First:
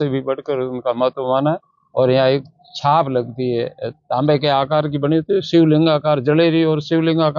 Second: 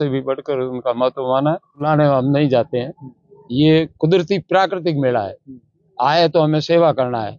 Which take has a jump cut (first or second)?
second